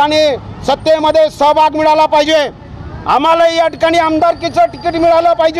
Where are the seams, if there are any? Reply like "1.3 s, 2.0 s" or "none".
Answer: none